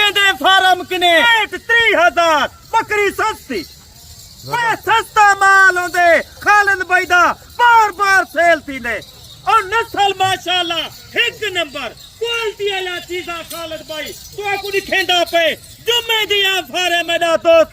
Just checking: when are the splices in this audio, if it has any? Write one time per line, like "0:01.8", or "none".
0:01.3